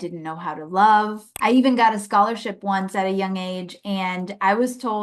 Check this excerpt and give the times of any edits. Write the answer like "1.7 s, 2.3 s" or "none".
1.2 s